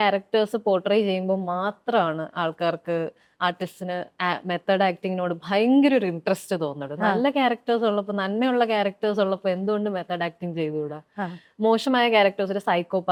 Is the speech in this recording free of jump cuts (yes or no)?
yes